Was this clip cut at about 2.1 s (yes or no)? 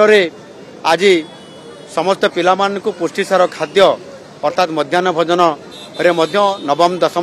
no